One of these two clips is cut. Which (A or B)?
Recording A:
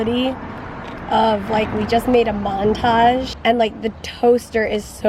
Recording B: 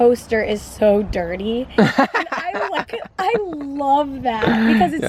A